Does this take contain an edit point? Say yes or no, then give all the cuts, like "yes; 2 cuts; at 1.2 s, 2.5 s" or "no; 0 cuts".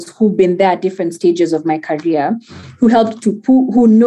no; 0 cuts